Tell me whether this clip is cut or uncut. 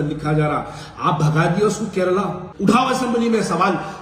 cut